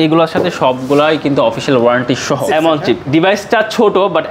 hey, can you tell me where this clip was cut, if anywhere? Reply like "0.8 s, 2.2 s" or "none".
2.4 s